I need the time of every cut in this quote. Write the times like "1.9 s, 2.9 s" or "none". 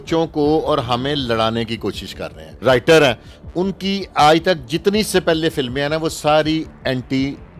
2.6 s